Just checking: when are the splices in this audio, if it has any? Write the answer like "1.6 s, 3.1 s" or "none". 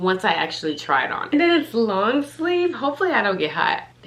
1.3 s